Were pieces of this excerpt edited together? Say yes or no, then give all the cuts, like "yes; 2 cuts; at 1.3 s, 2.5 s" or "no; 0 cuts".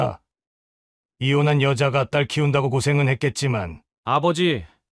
no; 0 cuts